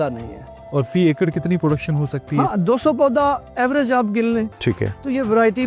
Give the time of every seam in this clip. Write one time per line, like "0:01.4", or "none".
0:04.5